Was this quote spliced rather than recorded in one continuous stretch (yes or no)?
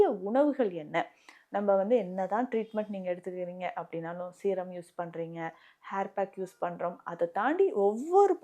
no